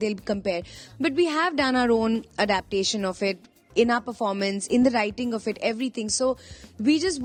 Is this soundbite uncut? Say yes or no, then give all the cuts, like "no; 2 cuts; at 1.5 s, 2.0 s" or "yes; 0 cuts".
yes; 0 cuts